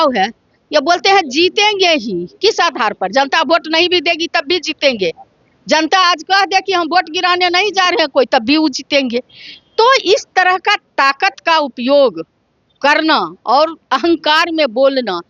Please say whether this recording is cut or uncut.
uncut